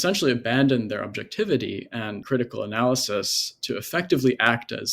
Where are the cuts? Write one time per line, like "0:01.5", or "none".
0:02.2